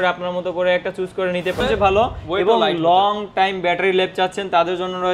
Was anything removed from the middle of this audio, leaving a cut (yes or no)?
yes